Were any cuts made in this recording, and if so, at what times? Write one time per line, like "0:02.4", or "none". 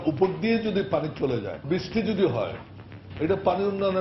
0:01.6

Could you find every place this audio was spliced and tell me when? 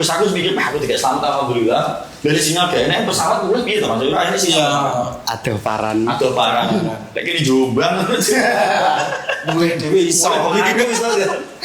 none

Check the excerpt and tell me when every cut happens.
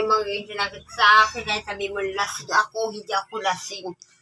none

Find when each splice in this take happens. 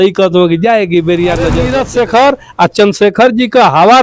0:01.8

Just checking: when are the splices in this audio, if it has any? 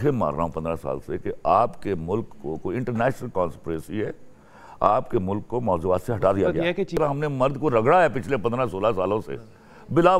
0:06.9

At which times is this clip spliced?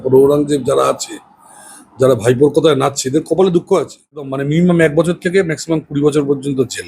0:04.4

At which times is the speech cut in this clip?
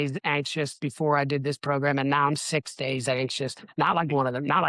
none

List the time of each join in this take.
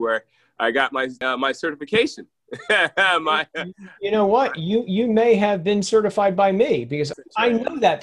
0:07.1

